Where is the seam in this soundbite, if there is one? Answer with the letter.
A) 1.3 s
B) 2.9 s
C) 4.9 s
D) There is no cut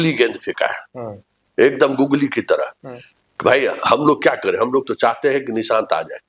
D